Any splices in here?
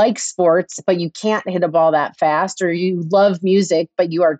no; 0 cuts

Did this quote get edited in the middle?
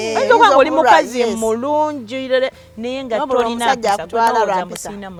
no; 0 cuts

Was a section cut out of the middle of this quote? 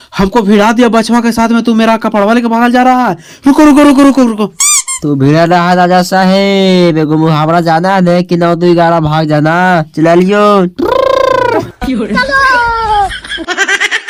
no; 0 cuts

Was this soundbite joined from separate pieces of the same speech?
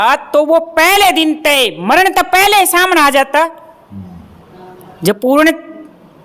no; 0 cuts

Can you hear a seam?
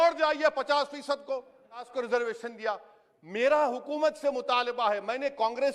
yes; 1 cut; at 1.9 s

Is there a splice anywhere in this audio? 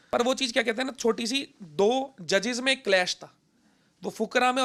no; 0 cuts

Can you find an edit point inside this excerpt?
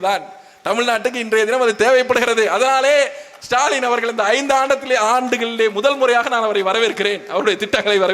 no; 0 cuts

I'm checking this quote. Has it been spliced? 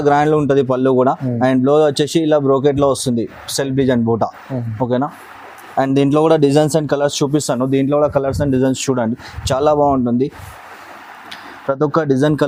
no; 0 cuts

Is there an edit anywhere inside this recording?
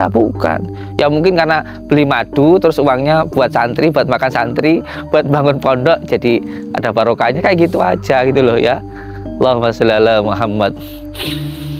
yes; 1 cut; at 10.8 s

